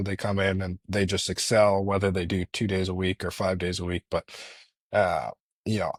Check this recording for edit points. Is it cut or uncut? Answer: uncut